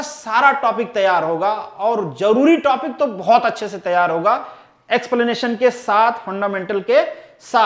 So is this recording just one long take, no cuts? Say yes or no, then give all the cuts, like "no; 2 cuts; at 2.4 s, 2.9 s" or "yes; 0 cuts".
yes; 0 cuts